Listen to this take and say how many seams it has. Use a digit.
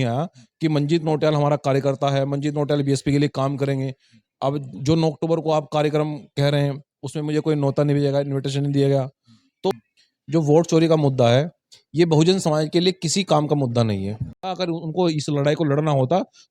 2